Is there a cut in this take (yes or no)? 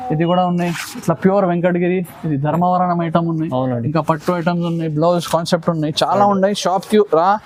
no